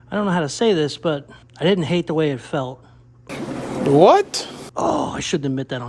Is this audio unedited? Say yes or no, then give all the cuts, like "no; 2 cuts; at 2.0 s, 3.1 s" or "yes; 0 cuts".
yes; 0 cuts